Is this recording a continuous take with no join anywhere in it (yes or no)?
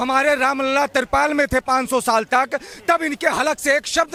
yes